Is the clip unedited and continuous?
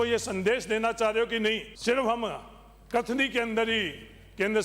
no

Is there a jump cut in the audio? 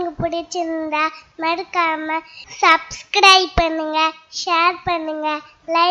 no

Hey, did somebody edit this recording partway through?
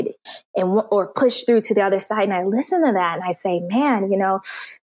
no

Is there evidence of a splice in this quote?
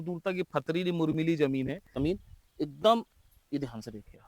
yes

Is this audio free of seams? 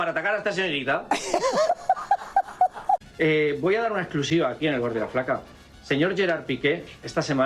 no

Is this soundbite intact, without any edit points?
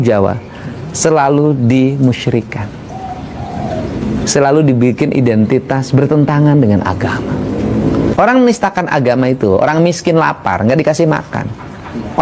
no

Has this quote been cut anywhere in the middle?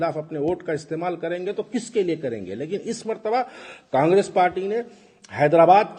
no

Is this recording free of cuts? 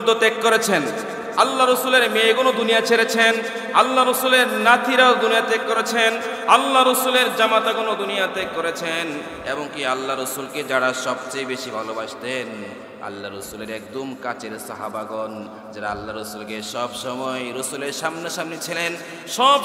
yes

